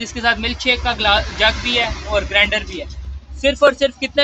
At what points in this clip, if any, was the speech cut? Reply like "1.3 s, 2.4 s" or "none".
none